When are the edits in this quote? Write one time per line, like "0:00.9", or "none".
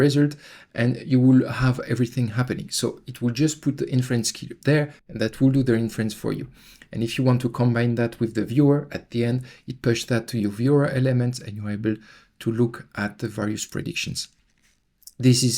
none